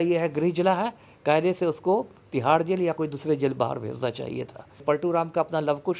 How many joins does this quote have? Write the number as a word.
one